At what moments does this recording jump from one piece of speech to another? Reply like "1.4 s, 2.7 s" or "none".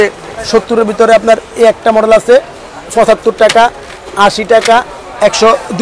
none